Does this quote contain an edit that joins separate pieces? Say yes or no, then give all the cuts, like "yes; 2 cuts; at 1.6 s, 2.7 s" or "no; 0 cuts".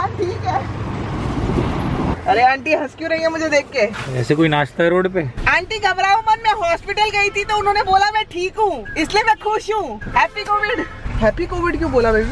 yes; 3 cuts; at 2.1 s, 5.4 s, 8.9 s